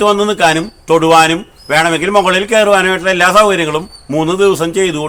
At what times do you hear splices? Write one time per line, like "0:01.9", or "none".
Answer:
none